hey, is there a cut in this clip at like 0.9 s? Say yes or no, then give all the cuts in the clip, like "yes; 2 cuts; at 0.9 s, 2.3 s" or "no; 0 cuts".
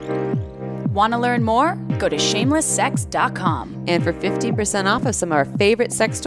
yes; 1 cut; at 0.9 s